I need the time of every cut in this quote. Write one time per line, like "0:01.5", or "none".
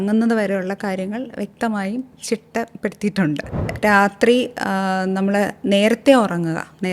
0:03.6